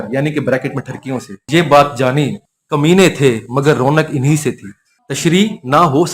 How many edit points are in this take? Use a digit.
1